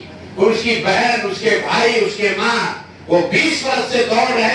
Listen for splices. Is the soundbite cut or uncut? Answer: uncut